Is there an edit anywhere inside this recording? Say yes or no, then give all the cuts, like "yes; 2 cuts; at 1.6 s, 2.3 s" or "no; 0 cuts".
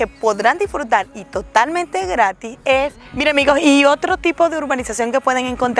yes; 1 cut; at 3.0 s